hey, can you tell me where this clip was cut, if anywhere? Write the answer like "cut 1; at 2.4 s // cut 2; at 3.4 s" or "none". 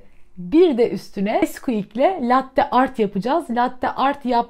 cut 1; at 1.4 s

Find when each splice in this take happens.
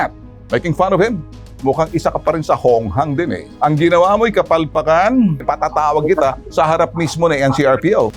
cut 1; at 1.4 s // cut 2; at 3.4 s

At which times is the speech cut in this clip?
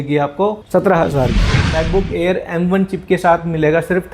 cut 1; at 1.6 s

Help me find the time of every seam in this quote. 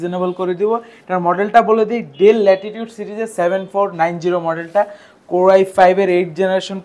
none

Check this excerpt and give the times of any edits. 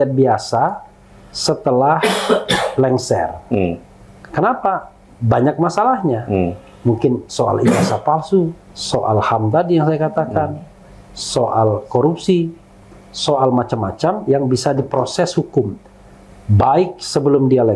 none

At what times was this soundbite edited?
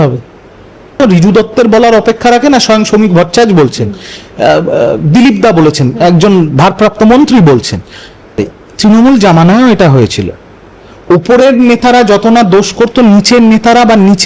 cut 1; at 1.0 s // cut 2; at 8.4 s

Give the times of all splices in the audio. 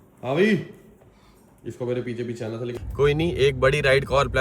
cut 1; at 2.8 s

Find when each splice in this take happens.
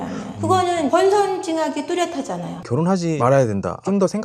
cut 1; at 2.5 s

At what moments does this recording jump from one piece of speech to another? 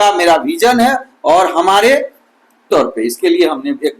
cut 1; at 2.6 s

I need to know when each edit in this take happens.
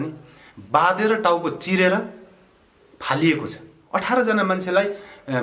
cut 1; at 3.8 s

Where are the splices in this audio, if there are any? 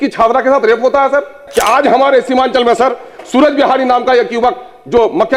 cut 1; at 1.4 s

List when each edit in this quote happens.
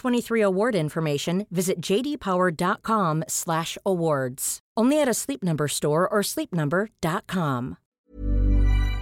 cut 1; at 8.0 s

